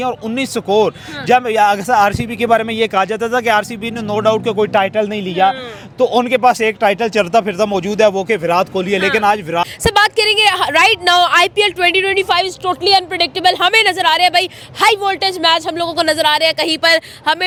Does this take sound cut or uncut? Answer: uncut